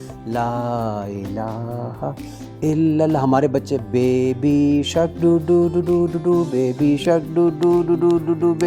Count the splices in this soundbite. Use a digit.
0